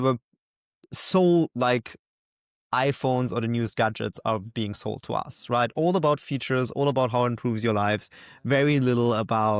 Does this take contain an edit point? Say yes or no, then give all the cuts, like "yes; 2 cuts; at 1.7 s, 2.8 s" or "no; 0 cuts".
no; 0 cuts